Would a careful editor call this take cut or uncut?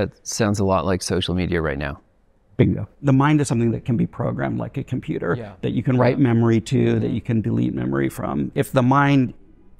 cut